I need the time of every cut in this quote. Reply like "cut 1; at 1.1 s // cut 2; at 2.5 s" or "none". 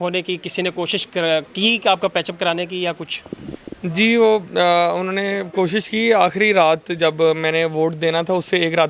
none